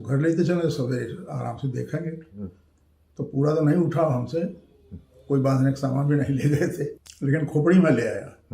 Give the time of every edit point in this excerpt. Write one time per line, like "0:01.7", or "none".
0:07.0